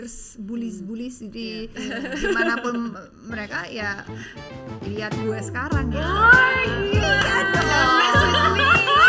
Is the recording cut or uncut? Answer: uncut